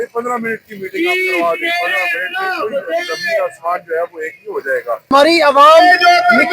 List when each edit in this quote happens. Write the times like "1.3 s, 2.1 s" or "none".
5.1 s